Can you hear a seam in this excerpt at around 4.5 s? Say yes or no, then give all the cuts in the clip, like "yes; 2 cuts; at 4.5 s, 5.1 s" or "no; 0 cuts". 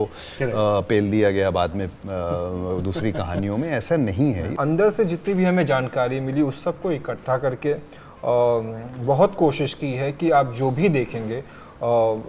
yes; 1 cut; at 4.5 s